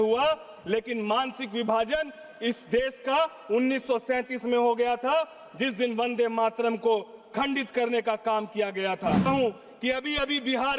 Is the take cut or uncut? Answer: cut